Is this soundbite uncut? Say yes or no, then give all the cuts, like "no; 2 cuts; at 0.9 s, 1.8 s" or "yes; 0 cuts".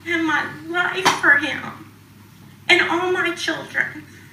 yes; 0 cuts